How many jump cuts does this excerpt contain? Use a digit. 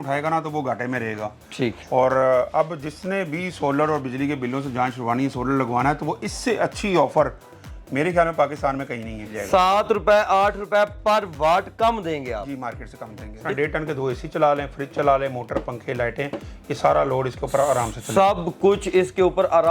2